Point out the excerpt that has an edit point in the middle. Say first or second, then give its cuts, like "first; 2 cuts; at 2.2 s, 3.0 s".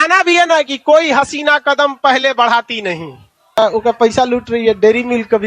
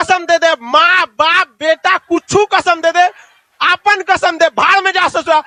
first; 1 cut; at 3.6 s